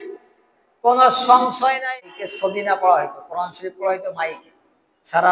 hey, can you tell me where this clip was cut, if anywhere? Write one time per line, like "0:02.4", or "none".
0:01.8